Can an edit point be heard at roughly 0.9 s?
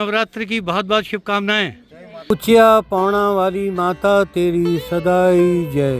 no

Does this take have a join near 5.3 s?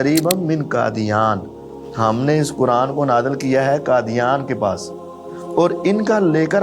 yes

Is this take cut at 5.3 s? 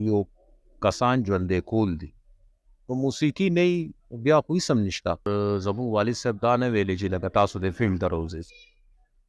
yes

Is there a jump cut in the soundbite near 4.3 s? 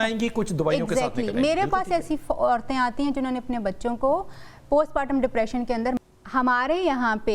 no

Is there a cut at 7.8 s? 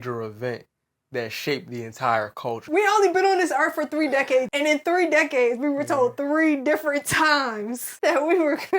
yes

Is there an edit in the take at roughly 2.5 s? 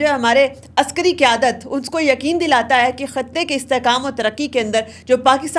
no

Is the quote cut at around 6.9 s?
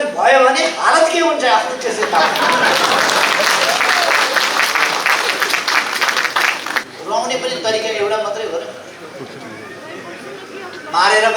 yes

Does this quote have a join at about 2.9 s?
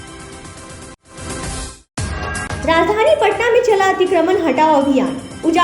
no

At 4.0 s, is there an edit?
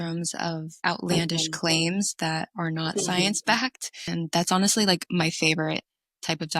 yes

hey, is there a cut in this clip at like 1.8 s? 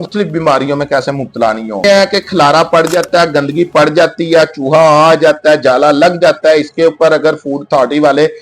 yes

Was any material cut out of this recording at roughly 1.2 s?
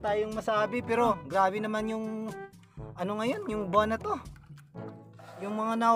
yes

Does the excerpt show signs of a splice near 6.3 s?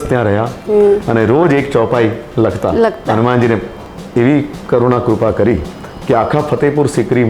no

